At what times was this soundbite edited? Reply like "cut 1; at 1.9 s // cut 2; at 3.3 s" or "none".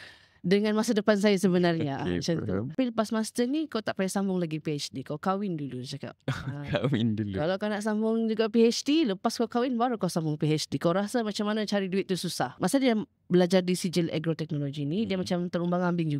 cut 1; at 2.7 s // cut 2; at 12.6 s